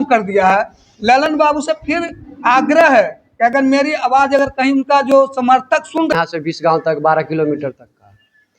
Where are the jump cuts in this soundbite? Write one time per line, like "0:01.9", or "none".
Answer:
0:06.1